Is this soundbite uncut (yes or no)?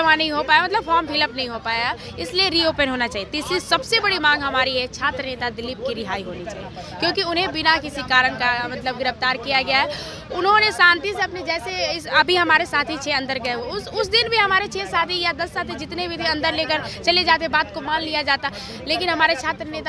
yes